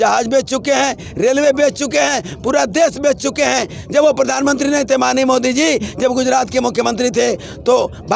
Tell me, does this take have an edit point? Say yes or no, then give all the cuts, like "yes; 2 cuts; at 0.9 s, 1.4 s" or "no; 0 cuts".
no; 0 cuts